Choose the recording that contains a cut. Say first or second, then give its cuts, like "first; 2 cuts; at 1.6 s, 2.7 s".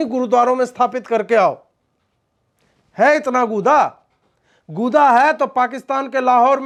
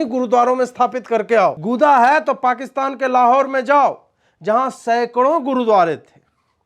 second; 1 cut; at 1.6 s